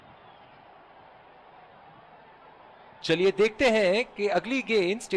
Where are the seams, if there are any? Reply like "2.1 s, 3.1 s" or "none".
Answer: 3.1 s